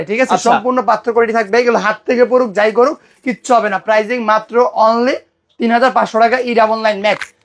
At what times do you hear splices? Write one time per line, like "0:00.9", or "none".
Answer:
none